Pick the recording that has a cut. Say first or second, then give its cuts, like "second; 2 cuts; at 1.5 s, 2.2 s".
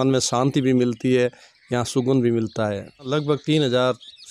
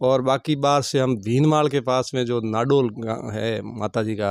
first; 1 cut; at 3.1 s